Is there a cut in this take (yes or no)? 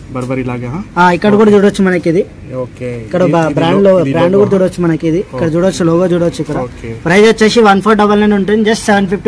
no